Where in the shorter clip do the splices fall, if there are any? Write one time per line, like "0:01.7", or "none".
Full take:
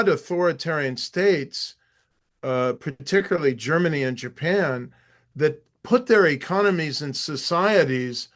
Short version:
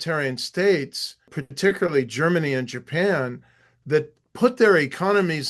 0:01.4